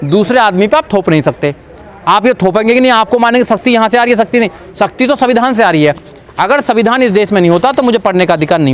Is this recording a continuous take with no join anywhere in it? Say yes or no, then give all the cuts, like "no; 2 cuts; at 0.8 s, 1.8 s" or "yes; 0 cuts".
yes; 0 cuts